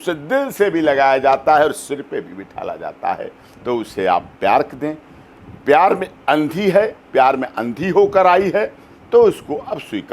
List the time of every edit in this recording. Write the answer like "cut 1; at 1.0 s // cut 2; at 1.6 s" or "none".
none